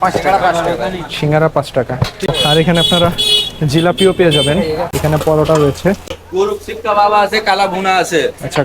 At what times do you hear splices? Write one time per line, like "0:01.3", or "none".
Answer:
0:02.3
0:04.9
0:06.2